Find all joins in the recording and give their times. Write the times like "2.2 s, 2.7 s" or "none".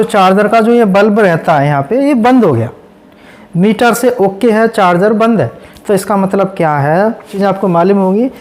7.3 s